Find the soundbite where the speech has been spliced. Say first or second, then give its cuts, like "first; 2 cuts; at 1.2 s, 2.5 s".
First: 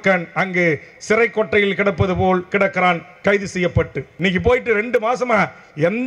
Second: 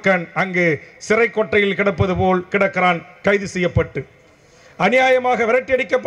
first; 1 cut; at 4.0 s